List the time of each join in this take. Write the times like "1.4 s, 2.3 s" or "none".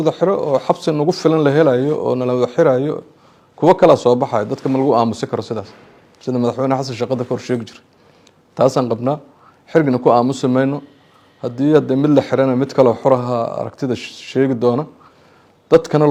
none

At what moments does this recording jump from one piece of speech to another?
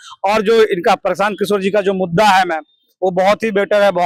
none

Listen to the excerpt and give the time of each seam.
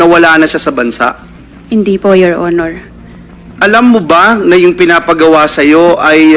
none

